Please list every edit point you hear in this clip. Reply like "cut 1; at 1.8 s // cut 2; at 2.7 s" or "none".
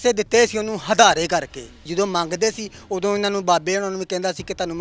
cut 1; at 1.8 s